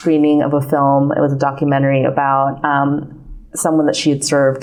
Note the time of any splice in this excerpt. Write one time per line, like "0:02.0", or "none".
none